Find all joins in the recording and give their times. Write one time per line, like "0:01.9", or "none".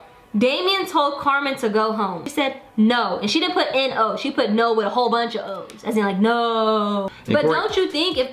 0:02.2
0:07.1